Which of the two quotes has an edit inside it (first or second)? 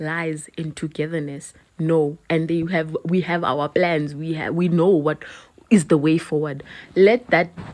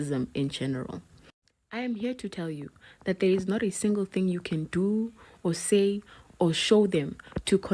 first